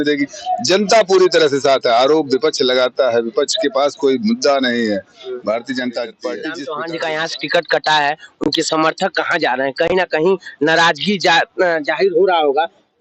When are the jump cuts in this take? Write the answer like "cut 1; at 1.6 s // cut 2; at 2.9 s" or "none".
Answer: cut 1; at 6.6 s